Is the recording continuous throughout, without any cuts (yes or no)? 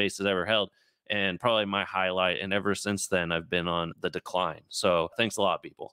yes